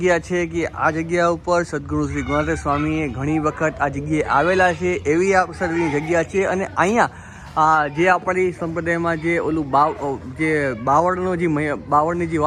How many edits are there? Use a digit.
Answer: 0